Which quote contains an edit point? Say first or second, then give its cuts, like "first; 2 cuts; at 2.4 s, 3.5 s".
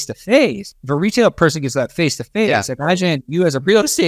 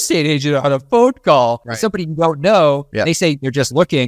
second; 2 cuts; at 1.7 s, 2.9 s